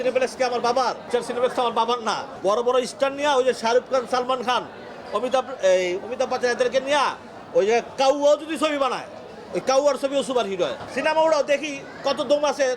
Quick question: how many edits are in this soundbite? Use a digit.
3